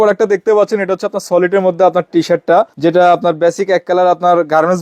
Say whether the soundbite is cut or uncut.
uncut